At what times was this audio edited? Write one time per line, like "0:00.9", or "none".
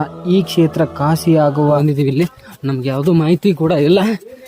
0:01.8